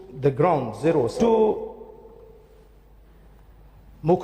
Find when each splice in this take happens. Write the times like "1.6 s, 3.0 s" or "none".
1.2 s